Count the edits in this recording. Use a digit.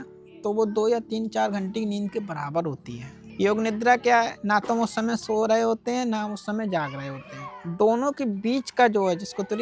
0